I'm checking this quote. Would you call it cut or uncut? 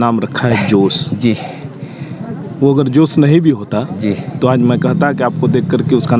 uncut